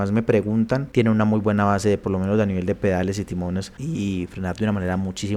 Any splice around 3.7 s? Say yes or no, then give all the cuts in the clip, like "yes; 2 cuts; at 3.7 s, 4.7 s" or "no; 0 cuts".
yes; 2 cuts; at 0.9 s, 3.7 s